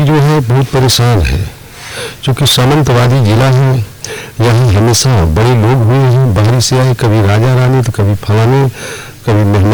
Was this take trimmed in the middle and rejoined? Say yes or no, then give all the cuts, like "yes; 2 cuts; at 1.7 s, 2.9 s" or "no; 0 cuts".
no; 0 cuts